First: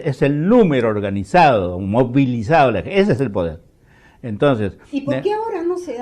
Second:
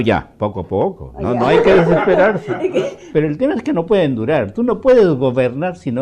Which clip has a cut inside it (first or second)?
second